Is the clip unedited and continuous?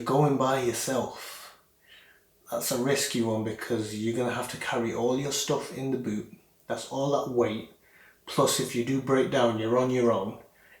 yes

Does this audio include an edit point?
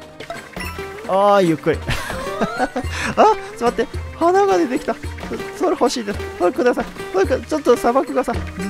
no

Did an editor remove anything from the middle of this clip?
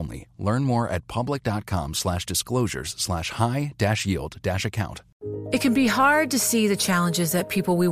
yes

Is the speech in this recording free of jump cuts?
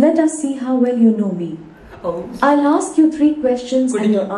yes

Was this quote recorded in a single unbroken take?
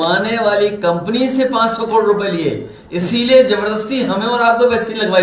yes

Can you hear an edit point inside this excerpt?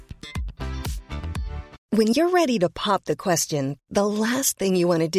yes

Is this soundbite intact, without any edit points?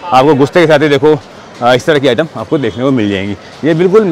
yes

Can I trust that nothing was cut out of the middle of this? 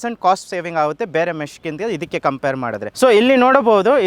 yes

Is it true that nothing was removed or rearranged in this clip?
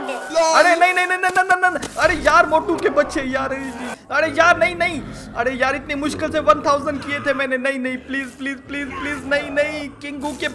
no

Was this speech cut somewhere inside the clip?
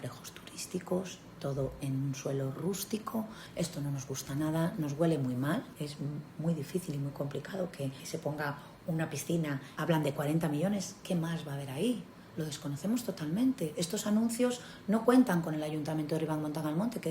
yes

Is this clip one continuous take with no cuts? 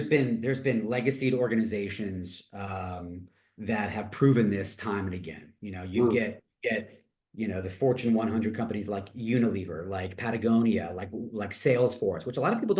yes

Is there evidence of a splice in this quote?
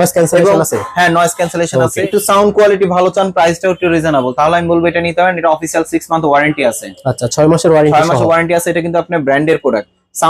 yes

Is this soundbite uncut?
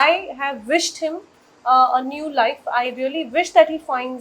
yes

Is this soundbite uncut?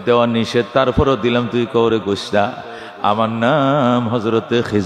yes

